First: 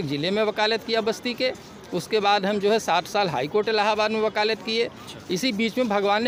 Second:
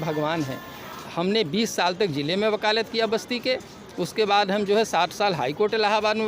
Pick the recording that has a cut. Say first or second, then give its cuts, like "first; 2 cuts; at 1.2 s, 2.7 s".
second; 1 cut; at 1.0 s